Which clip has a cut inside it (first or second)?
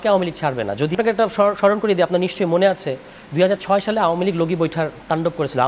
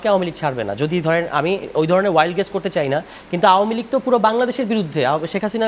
first